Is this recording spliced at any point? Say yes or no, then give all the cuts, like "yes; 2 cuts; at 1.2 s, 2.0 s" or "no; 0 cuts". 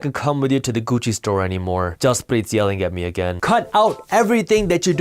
yes; 1 cut; at 1.9 s